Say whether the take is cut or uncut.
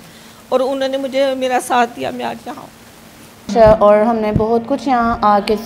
cut